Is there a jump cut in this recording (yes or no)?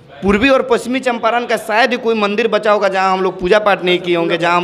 no